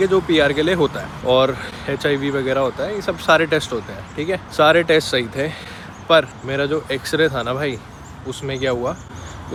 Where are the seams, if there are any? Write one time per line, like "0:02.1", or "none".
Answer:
none